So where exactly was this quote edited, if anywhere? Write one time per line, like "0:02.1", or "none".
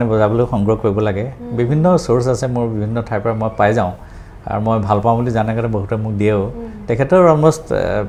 none